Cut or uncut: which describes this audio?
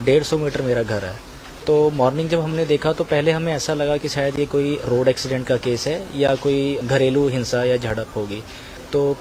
uncut